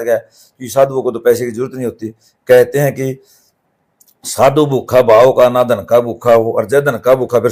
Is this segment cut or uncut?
uncut